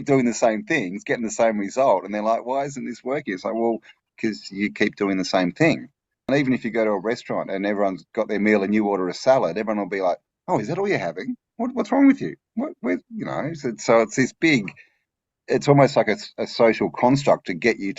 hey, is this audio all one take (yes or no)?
no